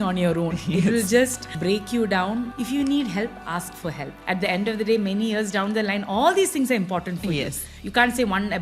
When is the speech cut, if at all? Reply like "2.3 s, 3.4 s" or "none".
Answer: 1.5 s, 2.5 s, 4.1 s, 7.7 s